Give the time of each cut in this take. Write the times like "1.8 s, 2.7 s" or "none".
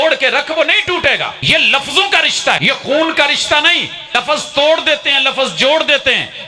1.4 s, 2.6 s, 4.1 s